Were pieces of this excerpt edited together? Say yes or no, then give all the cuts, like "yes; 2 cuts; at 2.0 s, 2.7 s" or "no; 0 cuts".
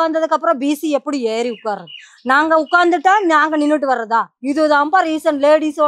yes; 1 cut; at 4.3 s